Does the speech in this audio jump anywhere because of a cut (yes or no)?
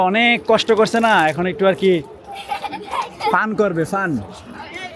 no